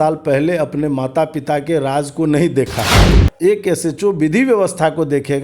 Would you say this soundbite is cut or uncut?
cut